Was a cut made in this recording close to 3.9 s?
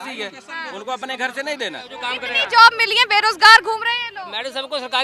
no; 1 cut; at 2.0 s

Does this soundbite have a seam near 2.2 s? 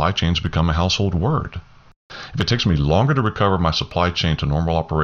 yes; 1 cut; at 2.2 s

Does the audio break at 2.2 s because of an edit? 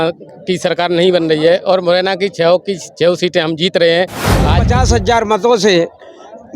no; 1 cut; at 4.7 s

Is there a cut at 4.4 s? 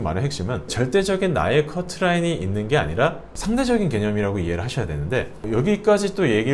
no; 0 cuts

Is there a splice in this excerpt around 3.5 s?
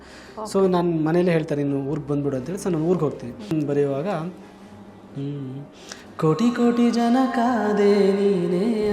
yes; 1 cut; at 3.5 s

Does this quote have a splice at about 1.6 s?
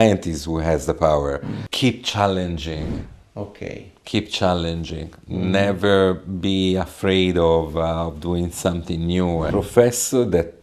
yes; 2 cuts; at 1.6 s, 9.5 s

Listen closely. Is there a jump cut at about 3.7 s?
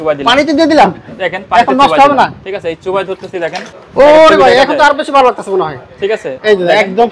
yes; 1 cut; at 3.7 s

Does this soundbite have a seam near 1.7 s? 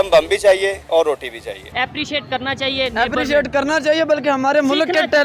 yes; 1 cut; at 1.7 s

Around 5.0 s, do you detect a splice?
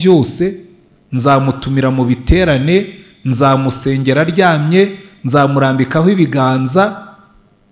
no; 0 cuts

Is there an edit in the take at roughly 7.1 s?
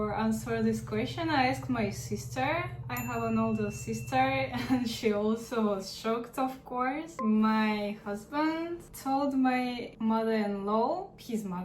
yes; 1 cut; at 7.1 s

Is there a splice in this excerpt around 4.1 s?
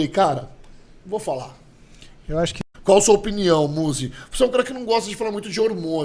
no; 1 cut; at 2.7 s

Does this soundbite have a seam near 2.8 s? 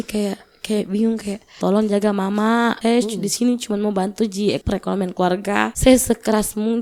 yes; 4 cuts; at 1.5 s, 2.8 s, 4.6 s, 5.7 s

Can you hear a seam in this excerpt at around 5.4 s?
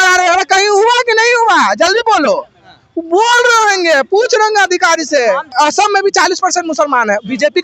yes; 1 cut; at 5.4 s

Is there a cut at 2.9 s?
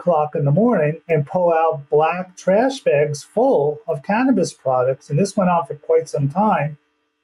no; 0 cuts

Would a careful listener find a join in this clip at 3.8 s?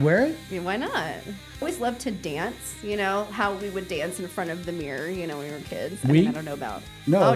no; 1 cut; at 1.6 s

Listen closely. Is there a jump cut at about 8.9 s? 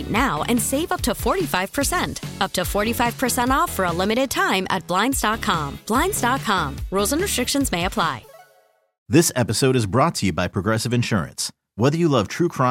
yes; 1 cut; at 8.9 s

